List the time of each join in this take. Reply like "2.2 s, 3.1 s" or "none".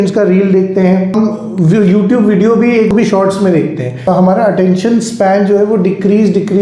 1.1 s, 2.9 s, 4.1 s